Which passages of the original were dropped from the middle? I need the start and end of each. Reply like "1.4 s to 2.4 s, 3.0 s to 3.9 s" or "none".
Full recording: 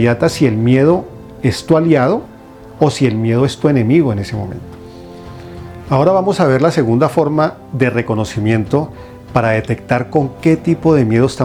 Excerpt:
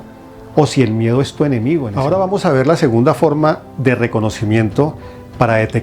4.1 s to 5.8 s